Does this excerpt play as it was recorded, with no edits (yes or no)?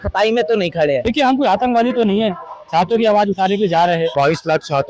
no